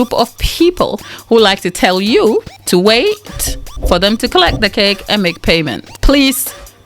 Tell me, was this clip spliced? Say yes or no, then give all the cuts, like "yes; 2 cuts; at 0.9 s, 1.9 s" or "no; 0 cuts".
yes; 3 cuts; at 1.1 s, 2.6 s, 5.9 s